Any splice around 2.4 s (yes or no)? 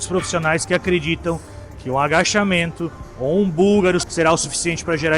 no